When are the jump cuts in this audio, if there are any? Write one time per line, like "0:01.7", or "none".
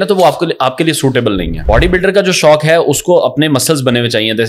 0:01.6